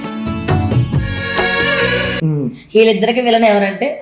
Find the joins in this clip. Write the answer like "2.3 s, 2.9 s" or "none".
none